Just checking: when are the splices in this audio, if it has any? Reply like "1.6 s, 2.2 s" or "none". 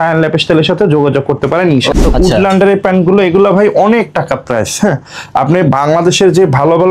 1.9 s